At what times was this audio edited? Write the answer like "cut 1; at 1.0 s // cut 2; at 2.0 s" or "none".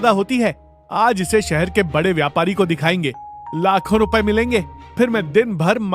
cut 1; at 4.8 s